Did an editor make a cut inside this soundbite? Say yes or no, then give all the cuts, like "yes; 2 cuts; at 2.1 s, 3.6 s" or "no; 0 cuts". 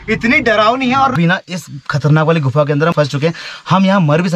yes; 2 cuts; at 1.1 s, 2.9 s